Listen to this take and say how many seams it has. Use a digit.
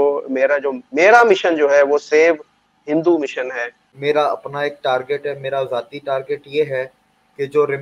1